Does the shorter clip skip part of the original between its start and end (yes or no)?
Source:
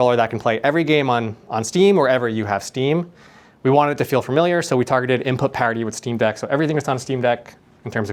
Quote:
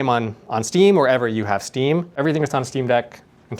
yes